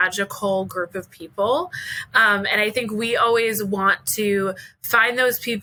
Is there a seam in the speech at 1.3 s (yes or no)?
no